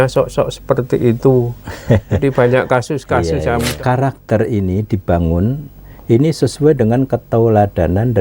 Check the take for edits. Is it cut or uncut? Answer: cut